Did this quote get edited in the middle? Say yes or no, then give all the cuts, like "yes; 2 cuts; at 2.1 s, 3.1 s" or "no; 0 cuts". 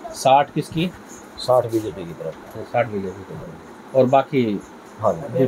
no; 0 cuts